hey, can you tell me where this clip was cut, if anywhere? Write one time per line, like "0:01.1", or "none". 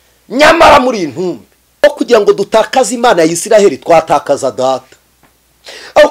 0:01.8

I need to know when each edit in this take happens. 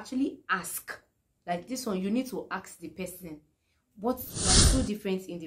0:04.6

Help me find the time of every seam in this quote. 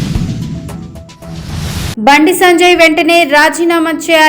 0:01.9

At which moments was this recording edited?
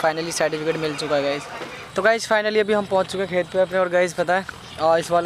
0:01.8

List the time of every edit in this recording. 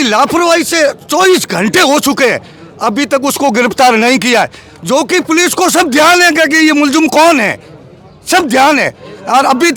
none

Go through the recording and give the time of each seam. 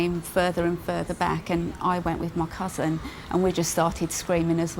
none

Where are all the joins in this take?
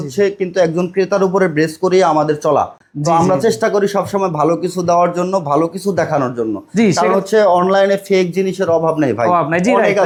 none

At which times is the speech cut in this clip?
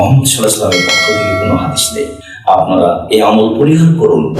0:02.3

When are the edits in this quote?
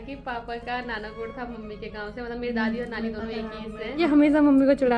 0:04.0

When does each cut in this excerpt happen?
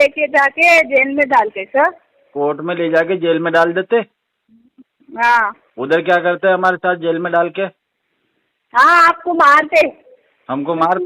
none

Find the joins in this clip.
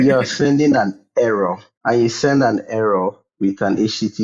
0:01.7

